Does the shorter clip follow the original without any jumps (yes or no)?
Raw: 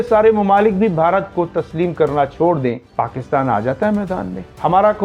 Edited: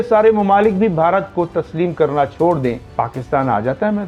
yes